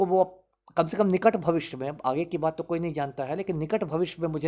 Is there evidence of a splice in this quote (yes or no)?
no